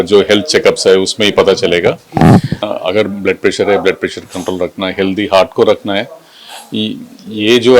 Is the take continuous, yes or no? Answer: no